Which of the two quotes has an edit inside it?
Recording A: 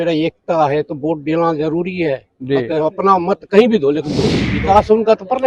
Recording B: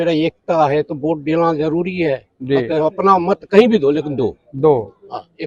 A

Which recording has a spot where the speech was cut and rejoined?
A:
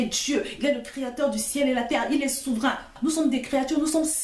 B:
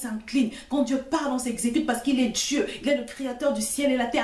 A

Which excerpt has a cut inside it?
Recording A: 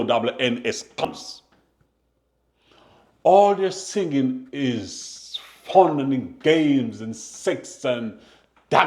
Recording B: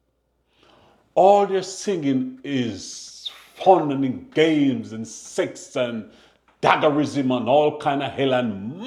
A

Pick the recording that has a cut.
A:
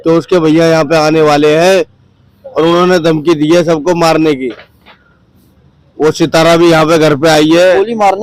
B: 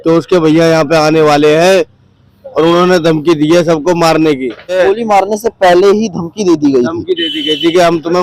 B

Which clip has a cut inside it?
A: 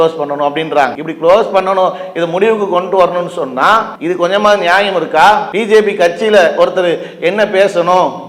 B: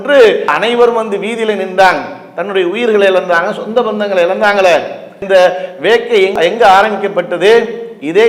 A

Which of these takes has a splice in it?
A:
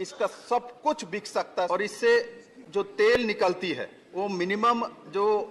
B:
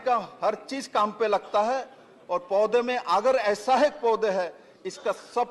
A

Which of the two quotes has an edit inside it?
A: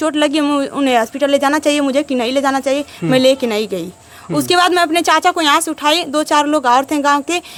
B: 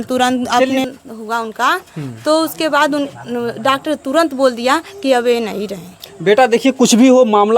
B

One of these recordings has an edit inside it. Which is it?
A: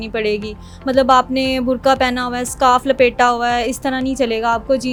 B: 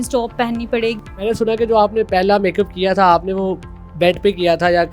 B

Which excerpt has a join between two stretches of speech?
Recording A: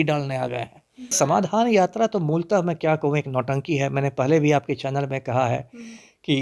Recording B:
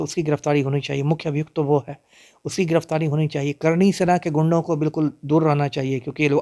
A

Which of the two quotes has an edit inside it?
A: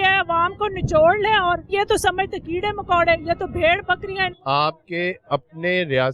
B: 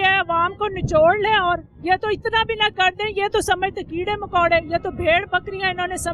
A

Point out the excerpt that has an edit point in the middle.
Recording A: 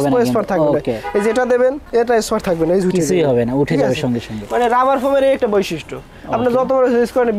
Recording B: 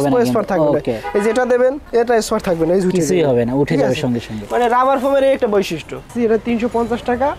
B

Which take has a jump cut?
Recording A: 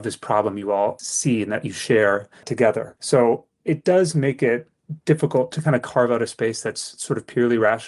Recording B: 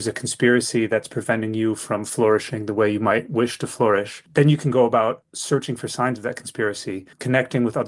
A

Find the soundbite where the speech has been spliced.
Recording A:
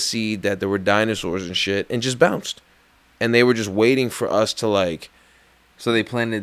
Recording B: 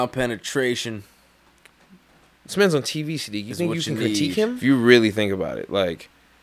B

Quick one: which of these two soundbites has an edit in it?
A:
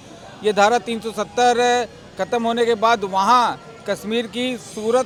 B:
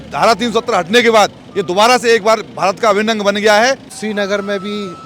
B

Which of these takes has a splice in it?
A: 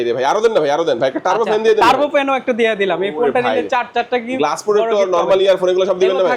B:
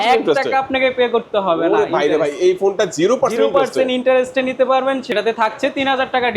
B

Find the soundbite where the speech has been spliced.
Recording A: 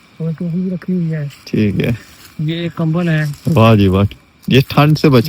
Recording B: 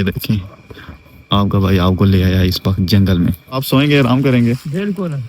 B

